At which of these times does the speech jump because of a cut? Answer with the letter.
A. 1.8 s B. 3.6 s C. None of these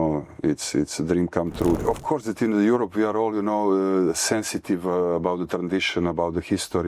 A